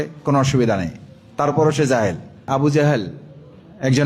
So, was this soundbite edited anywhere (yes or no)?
yes